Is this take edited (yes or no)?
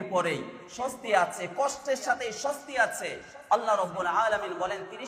no